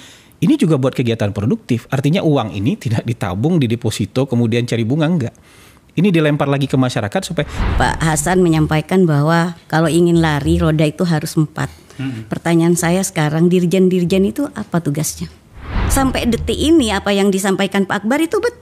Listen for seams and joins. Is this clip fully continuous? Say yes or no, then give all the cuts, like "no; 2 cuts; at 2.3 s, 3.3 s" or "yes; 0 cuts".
no; 2 cuts; at 7.6 s, 15.8 s